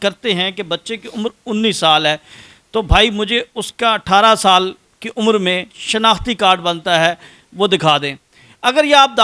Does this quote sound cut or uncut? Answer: uncut